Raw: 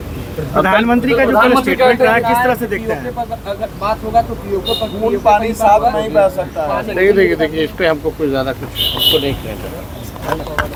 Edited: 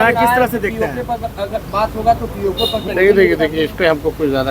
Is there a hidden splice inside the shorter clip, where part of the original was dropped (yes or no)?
yes